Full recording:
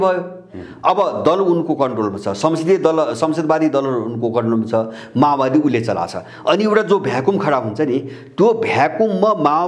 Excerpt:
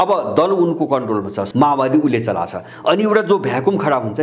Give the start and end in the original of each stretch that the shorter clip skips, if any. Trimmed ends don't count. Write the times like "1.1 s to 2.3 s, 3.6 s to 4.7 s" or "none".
2.3 s to 5.0 s